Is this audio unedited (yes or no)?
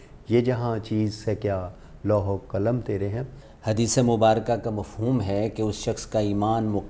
no